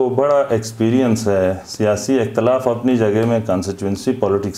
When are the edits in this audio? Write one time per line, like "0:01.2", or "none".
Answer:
none